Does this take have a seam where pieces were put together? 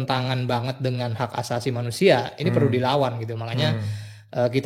no; 0 cuts

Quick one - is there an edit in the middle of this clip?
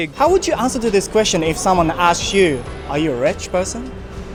no; 0 cuts

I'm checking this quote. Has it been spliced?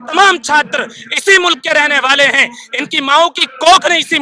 no; 0 cuts

